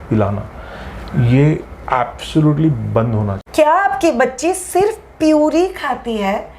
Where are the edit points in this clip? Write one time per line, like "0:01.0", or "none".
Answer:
0:03.4